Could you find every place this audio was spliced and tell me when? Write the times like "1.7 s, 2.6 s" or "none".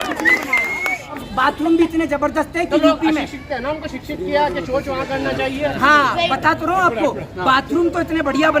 1.3 s

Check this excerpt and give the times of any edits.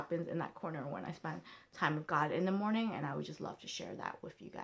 none

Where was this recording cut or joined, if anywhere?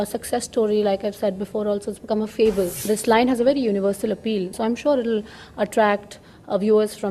2.8 s, 4.5 s

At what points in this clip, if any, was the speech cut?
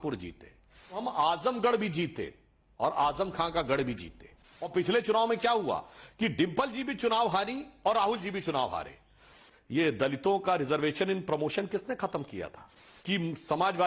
1.0 s, 4.7 s, 9.2 s, 12.9 s

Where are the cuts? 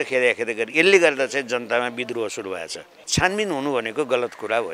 3.1 s

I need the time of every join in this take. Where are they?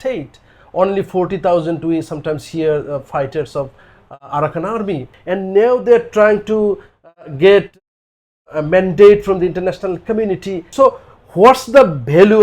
5.1 s, 10.7 s

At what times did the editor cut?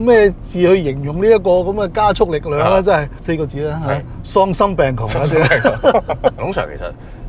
3.1 s, 6.4 s

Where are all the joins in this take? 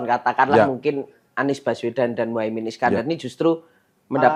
none

